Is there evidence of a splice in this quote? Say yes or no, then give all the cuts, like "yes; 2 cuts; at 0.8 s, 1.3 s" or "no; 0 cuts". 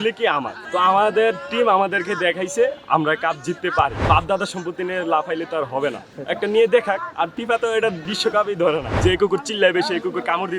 yes; 4 cuts; at 4.0 s, 7.4 s, 8.1 s, 8.9 s